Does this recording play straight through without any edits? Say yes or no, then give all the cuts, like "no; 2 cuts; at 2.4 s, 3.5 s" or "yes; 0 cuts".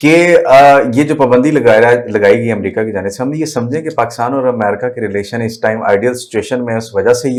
yes; 0 cuts